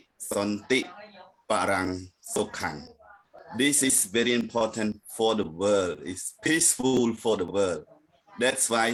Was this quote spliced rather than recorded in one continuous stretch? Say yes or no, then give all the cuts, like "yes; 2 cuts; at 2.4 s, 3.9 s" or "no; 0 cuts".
no; 0 cuts